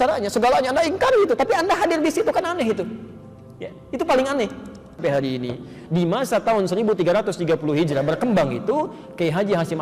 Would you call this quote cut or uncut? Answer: cut